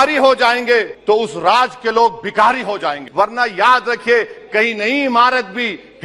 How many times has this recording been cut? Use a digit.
2